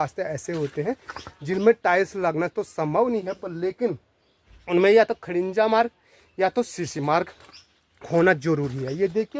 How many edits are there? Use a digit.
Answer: 0